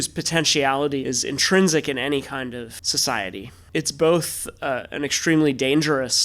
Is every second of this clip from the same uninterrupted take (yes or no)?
no